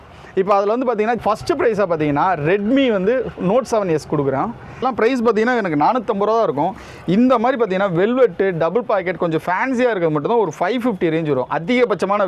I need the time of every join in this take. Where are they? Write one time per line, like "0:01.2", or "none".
0:01.2
0:04.8